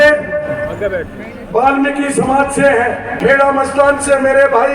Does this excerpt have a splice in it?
yes; 1 cut; at 3.2 s

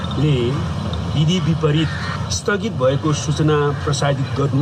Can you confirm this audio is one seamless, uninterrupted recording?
yes; 0 cuts

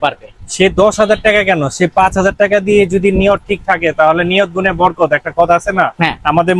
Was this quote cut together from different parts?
no; 0 cuts

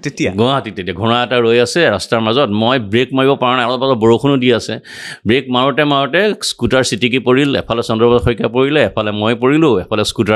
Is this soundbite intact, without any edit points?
yes; 0 cuts

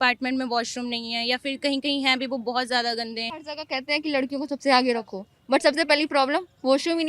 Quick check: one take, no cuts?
no; 1 cut; at 3.4 s

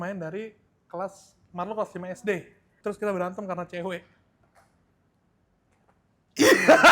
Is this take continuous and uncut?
no; 2 cuts; at 2.7 s, 4.5 s

